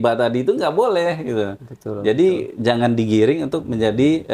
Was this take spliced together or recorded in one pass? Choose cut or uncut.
uncut